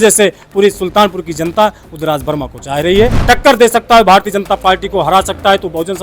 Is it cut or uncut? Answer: cut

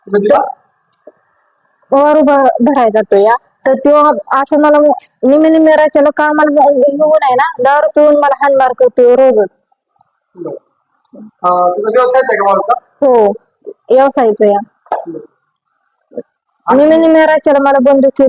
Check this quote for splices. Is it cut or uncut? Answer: uncut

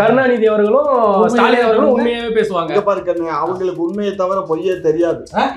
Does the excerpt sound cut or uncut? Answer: uncut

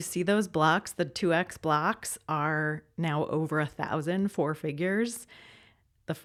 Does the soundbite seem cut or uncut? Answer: uncut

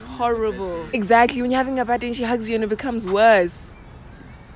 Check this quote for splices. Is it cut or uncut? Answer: cut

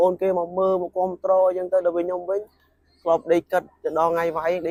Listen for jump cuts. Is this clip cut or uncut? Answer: uncut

